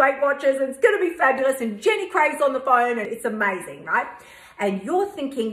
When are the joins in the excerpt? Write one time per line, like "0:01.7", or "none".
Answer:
0:03.1